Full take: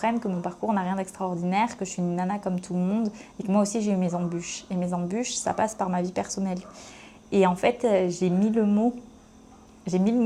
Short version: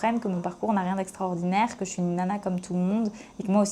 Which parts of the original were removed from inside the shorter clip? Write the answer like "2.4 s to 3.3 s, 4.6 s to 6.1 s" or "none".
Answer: none